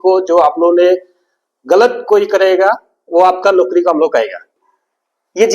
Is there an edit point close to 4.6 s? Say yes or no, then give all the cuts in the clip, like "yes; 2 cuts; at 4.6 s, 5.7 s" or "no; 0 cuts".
yes; 1 cut; at 4.6 s